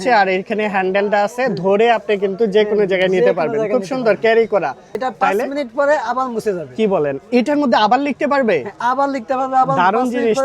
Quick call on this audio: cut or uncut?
cut